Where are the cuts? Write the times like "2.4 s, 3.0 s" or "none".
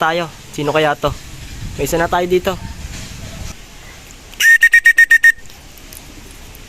3.5 s